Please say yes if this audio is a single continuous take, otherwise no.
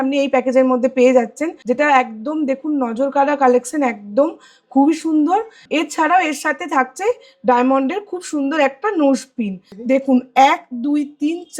no